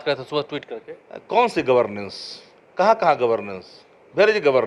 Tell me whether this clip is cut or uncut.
uncut